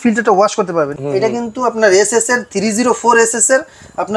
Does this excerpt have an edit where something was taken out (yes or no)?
yes